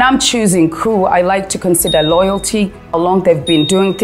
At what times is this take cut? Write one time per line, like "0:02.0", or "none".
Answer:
0:03.0